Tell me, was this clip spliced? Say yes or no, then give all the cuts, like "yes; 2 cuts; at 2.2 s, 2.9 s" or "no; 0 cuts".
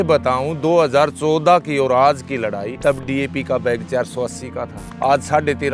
yes; 2 cuts; at 2.7 s, 4.8 s